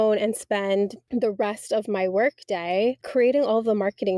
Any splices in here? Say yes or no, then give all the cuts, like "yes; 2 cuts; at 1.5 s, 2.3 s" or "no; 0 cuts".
yes; 2 cuts; at 1.0 s, 3.0 s